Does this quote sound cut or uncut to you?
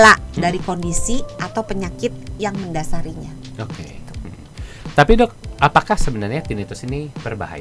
uncut